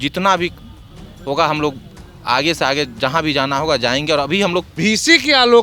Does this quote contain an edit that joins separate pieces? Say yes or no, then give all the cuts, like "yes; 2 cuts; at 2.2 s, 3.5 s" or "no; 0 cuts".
yes; 1 cut; at 4.7 s